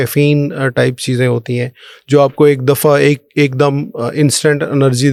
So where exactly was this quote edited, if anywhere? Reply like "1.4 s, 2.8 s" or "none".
none

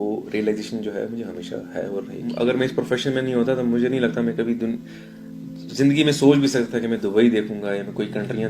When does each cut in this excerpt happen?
2.1 s

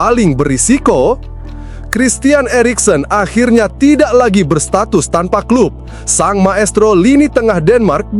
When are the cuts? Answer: none

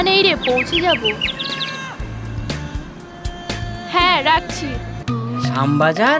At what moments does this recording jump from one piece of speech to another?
4.9 s

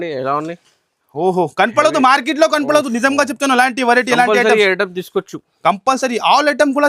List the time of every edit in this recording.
none

